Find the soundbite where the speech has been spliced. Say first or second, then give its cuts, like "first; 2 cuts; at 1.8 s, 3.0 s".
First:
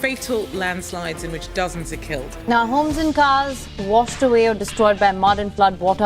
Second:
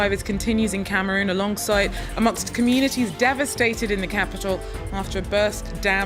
first; 1 cut; at 2.4 s